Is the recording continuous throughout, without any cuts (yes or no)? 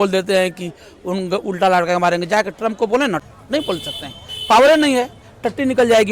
no